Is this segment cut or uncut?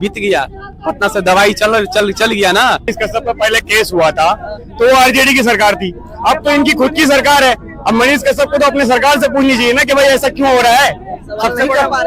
cut